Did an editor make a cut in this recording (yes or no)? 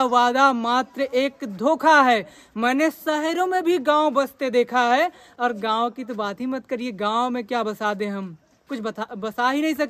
no